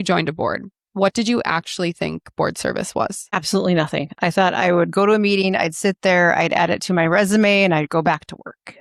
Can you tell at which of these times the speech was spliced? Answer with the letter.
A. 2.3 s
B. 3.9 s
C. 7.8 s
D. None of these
D